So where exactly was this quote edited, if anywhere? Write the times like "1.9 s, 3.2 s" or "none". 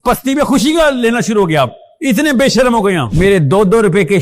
3.1 s